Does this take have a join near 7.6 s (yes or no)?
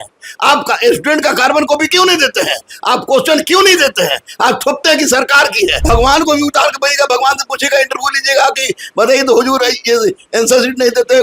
no